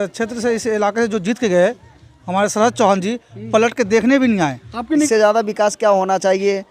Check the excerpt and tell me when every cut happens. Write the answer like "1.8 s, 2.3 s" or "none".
5.1 s

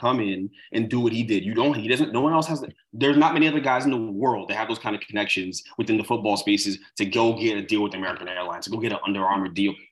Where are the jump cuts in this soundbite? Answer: none

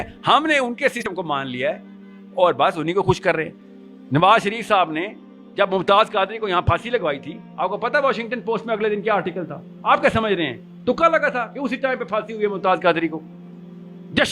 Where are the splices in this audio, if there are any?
1.1 s

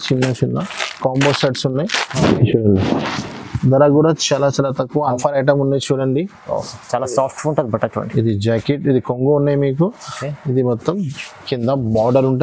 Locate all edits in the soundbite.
5.1 s

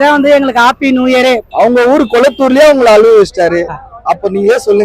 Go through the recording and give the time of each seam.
1.5 s

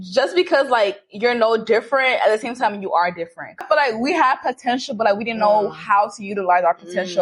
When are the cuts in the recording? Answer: 3.6 s

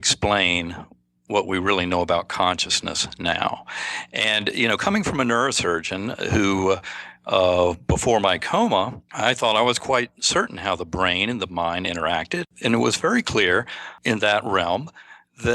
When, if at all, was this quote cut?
9.0 s, 12.4 s, 13.9 s

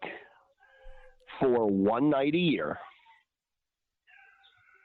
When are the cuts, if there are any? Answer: none

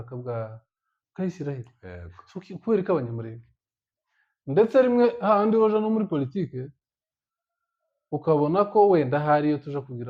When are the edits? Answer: none

